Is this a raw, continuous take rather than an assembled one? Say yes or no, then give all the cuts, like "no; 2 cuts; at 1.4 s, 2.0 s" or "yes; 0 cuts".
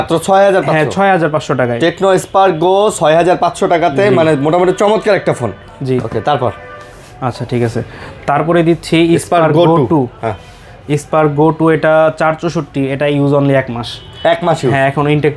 yes; 0 cuts